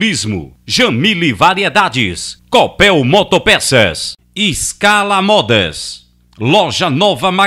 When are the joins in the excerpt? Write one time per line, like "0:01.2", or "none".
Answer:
none